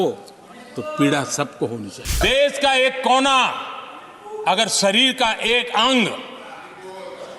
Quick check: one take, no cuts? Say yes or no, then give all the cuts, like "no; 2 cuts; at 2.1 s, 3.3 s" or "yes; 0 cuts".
no; 1 cut; at 2.2 s